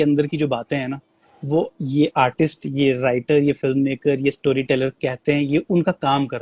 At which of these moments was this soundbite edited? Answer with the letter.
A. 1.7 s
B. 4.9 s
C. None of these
C